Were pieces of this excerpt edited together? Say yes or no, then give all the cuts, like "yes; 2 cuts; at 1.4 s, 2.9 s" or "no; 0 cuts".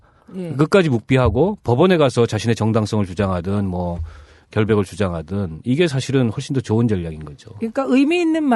no; 0 cuts